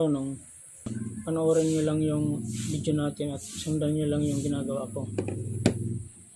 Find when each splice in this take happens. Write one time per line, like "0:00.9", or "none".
0:01.0